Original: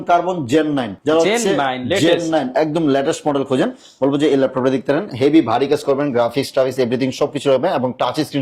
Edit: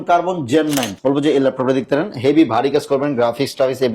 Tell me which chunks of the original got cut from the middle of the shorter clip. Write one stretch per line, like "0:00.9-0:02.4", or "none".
0:00.9-0:03.9